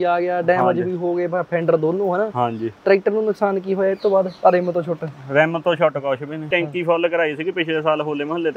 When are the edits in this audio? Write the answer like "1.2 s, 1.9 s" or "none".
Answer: 6.5 s